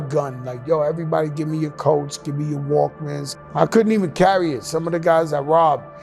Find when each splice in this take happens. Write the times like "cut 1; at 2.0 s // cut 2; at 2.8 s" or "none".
cut 1; at 3.3 s

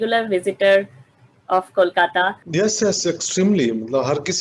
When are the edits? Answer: cut 1; at 2.4 s

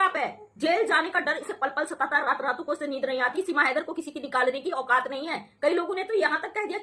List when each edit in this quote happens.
cut 1; at 3.3 s

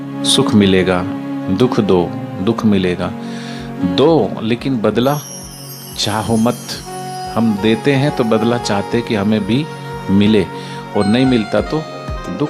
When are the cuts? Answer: none

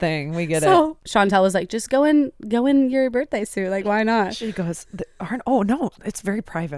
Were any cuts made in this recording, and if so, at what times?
cut 1; at 1.0 s

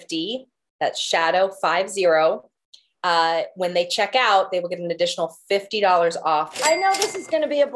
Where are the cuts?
cut 1; at 6.5 s

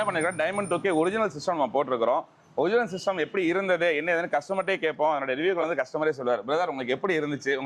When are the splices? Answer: none

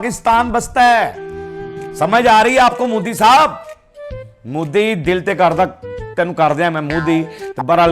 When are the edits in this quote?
none

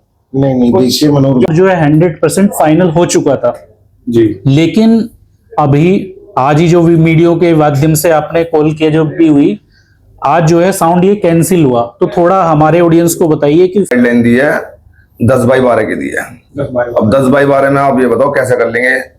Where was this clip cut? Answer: cut 1; at 1.5 s // cut 2; at 13.9 s

